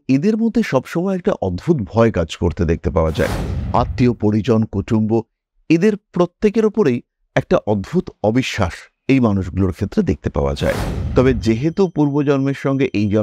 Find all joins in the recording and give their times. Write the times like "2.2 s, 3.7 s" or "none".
10.9 s